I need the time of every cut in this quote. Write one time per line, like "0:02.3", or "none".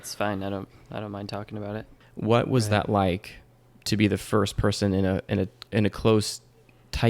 0:01.9
0:05.6